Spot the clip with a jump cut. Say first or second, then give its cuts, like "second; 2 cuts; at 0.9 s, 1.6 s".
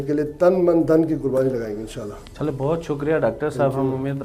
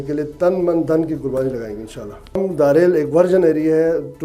second; 1 cut; at 2.4 s